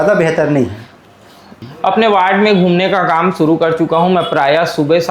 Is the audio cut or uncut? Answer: cut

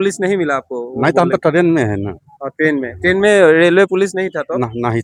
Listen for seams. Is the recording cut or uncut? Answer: uncut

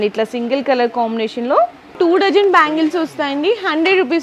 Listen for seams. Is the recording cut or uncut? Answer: cut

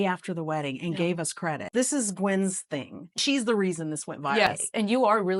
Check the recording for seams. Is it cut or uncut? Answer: cut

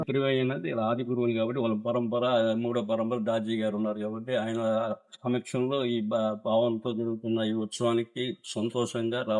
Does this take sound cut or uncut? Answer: uncut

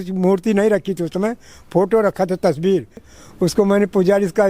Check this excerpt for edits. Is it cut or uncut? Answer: cut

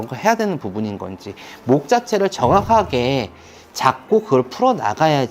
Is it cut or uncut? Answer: uncut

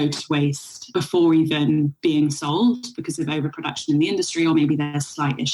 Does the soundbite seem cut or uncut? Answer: cut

